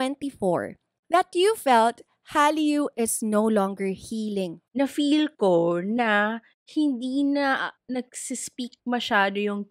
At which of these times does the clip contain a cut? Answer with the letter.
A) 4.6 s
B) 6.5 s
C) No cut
A